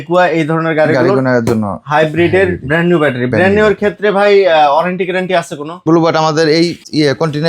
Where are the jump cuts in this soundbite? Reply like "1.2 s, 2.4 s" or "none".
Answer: 5.8 s